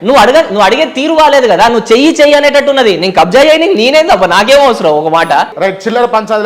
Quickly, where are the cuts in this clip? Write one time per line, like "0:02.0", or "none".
0:05.5